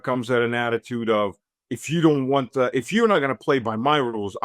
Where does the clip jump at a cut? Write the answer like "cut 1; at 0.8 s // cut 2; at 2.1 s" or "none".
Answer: none